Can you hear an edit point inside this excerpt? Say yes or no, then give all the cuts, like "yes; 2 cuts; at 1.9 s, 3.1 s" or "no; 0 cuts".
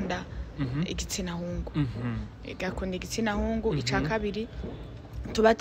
no; 0 cuts